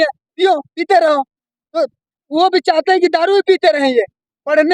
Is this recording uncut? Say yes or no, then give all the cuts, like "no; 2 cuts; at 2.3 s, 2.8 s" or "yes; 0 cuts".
yes; 0 cuts